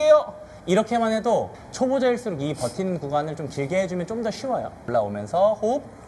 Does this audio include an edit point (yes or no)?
yes